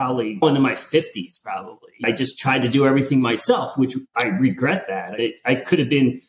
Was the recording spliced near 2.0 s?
yes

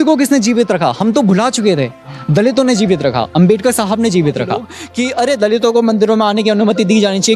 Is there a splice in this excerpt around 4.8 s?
yes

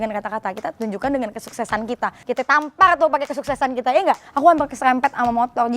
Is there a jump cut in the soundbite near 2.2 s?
yes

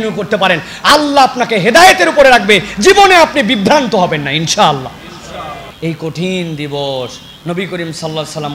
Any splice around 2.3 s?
no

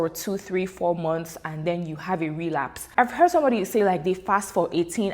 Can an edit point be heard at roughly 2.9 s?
yes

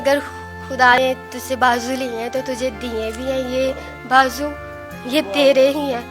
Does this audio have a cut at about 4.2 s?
no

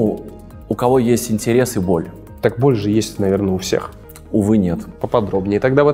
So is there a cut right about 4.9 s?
yes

